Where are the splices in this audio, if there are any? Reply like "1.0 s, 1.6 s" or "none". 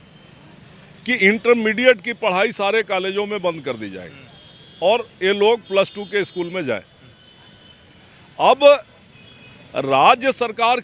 none